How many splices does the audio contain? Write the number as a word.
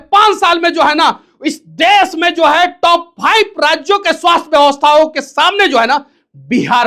zero